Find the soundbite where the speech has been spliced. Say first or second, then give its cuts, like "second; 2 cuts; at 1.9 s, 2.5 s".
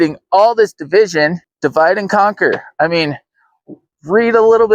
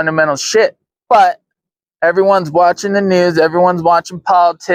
first; 1 cut; at 1.5 s